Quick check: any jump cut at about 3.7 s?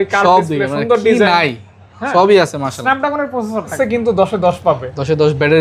yes; 1 cut; at 3.7 s

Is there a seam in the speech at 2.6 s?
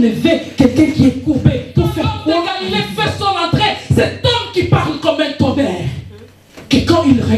yes; 1 cut; at 2.6 s

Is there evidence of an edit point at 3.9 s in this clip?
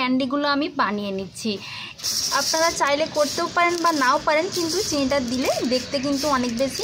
no; 1 cut; at 2.0 s

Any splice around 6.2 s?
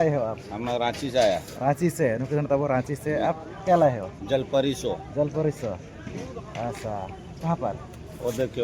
no; 0 cuts

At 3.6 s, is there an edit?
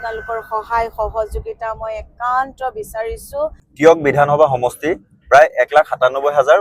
yes; 1 cut; at 3.6 s

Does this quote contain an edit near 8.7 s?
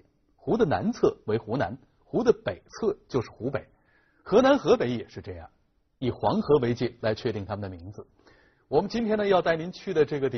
no; 1 cut; at 7.2 s

